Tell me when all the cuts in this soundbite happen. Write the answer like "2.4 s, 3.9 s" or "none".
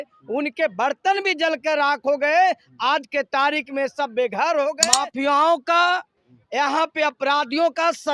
4.8 s